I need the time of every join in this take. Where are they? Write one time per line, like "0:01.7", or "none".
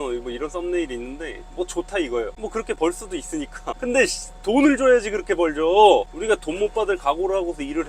0:06.1